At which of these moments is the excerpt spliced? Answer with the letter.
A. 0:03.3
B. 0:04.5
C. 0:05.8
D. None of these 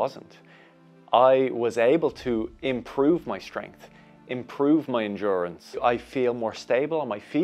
C